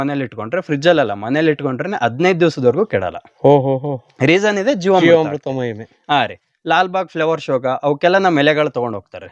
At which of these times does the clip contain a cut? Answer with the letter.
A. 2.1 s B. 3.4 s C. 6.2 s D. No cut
D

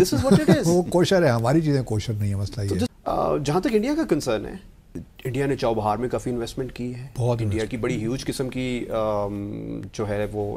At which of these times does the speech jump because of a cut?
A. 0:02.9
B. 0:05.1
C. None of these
A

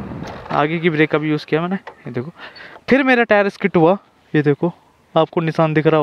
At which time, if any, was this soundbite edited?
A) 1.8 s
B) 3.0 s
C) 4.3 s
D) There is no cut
D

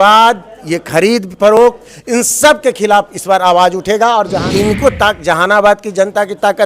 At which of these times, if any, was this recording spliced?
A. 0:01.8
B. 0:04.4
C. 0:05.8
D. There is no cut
B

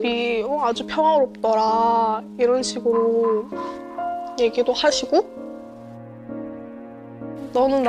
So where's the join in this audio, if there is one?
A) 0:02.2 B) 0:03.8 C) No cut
C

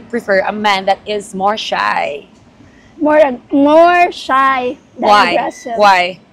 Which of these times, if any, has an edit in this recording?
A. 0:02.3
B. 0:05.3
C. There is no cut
C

